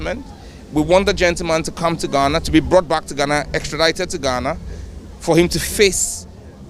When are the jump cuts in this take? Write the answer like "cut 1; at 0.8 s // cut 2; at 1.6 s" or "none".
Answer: none